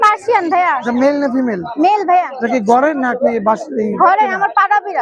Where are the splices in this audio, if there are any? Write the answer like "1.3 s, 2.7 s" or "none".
none